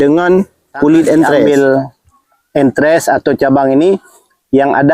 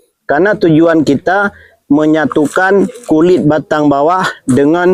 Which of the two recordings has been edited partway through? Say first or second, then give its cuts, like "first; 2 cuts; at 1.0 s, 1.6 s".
first; 1 cut; at 1.5 s